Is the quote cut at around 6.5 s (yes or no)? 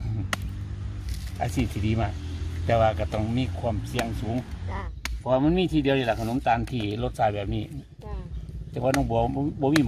no